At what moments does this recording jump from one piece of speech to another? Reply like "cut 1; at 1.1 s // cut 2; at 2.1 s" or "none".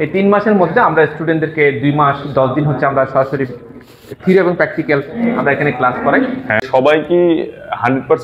cut 1; at 6.6 s